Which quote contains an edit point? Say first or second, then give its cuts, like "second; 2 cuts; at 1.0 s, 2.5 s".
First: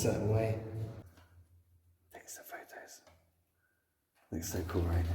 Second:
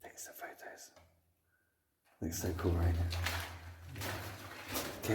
first; 1 cut; at 1.0 s